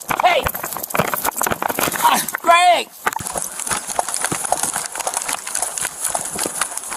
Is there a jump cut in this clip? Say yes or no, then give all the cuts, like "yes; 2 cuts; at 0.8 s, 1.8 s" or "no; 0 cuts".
no; 0 cuts